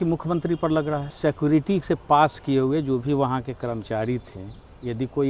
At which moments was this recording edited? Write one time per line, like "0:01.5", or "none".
0:01.1